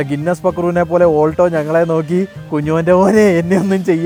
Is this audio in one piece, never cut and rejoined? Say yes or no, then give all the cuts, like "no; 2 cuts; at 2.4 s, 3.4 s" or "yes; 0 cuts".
yes; 0 cuts